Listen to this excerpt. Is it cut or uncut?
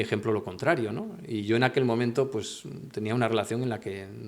uncut